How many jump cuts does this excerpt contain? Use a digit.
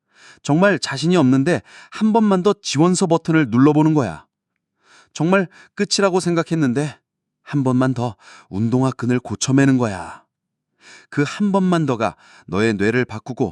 0